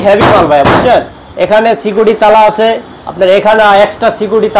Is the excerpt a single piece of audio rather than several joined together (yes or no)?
yes